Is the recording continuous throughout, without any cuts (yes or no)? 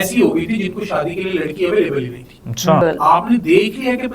no